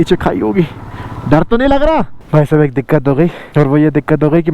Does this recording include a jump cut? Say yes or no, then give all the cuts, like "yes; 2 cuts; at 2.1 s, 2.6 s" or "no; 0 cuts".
yes; 1 cut; at 2.2 s